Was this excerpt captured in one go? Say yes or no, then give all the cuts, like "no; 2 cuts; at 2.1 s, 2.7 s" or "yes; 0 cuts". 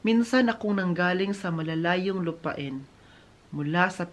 yes; 0 cuts